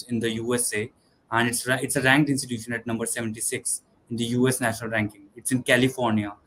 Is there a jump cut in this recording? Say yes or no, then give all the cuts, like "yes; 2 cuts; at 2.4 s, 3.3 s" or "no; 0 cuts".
no; 0 cuts